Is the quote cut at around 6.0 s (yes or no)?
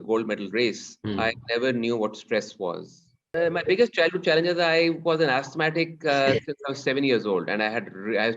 no